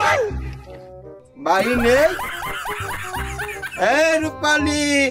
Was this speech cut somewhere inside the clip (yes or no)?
no